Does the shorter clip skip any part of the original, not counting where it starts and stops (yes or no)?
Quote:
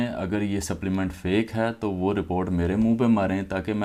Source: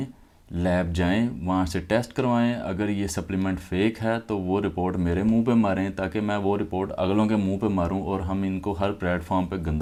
no